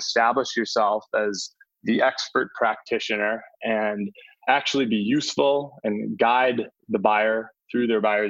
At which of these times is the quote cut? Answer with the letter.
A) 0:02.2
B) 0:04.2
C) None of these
B